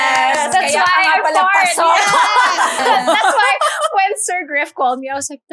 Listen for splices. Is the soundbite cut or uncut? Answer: cut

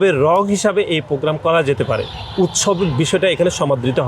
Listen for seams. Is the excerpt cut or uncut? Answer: uncut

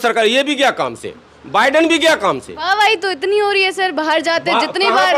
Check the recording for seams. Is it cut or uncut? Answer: uncut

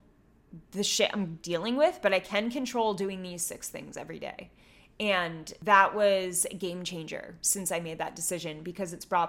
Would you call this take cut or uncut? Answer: cut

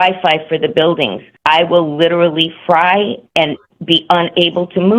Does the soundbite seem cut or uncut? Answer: cut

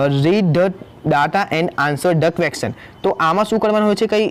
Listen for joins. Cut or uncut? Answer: uncut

